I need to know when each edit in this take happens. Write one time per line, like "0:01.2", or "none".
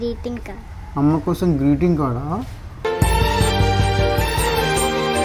none